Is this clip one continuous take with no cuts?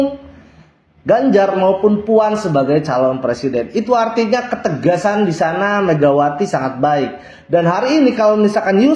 yes; 0 cuts

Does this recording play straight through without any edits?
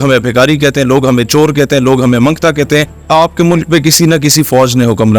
no; 1 cut; at 3.0 s

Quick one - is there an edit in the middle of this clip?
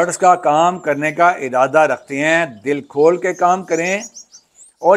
no; 0 cuts

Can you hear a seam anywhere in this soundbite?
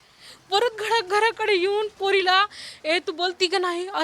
no; 0 cuts

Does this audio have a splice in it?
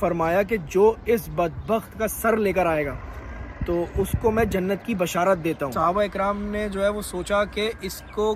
yes; 1 cut; at 5.7 s

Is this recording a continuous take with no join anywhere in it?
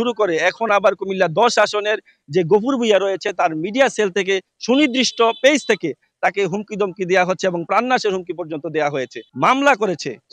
no; 1 cut; at 9.2 s

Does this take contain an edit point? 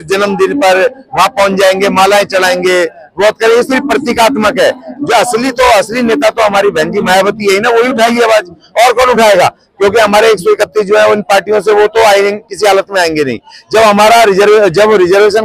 no; 0 cuts

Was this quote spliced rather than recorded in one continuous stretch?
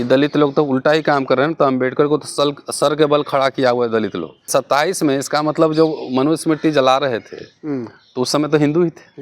yes; 1 cut; at 4.5 s

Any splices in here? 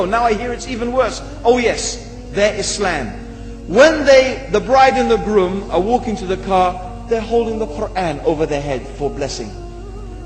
yes; 1 cut; at 2.4 s

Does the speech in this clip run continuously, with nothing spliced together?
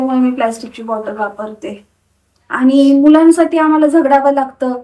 yes; 0 cuts

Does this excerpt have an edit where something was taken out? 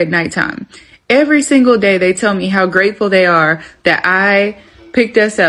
no; 0 cuts

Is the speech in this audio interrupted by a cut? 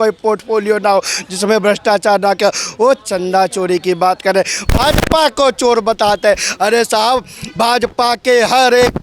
no; 0 cuts

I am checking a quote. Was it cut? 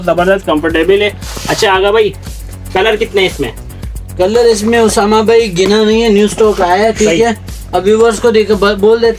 no; 0 cuts

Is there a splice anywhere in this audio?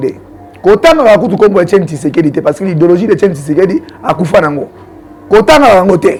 no; 0 cuts

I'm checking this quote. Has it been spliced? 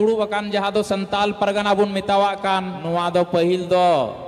yes; 1 cut; at 2.8 s

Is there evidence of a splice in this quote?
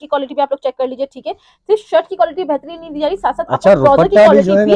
no; 0 cuts

